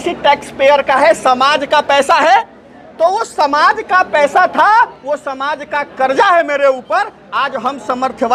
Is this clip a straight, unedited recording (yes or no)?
yes